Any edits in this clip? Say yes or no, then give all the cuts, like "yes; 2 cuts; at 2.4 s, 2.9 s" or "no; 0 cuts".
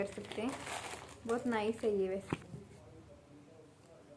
yes; 1 cut; at 2.5 s